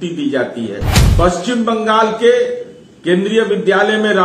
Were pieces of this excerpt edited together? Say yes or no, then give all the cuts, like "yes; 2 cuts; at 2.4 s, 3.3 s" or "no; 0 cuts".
yes; 1 cut; at 1.0 s